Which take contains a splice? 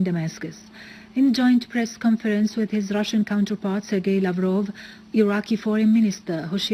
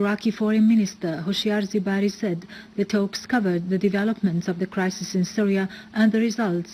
first; 1 cut; at 2.1 s

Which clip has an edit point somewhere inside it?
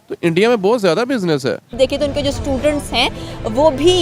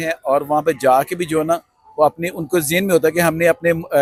first; 1 cut; at 1.7 s

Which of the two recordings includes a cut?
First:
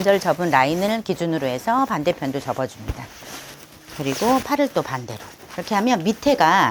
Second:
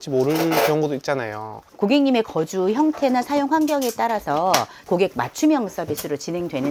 second; 1 cut; at 4.9 s

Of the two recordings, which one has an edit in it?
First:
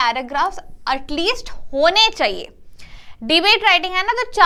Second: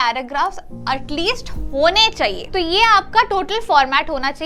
second; 1 cut; at 2.4 s

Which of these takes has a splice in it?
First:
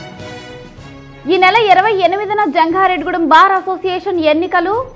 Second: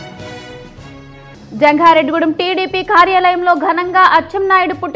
first; 1 cut; at 1.0 s

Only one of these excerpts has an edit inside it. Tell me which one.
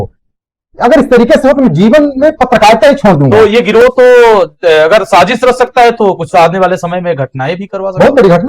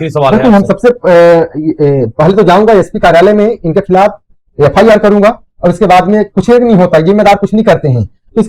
first; 1 cut; at 3.3 s

